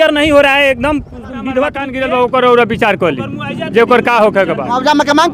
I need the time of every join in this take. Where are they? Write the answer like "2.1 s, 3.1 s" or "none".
1.9 s